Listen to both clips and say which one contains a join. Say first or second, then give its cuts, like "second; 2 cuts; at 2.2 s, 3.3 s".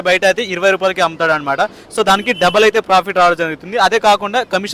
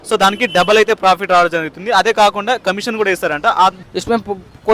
second; 1 cut; at 3.8 s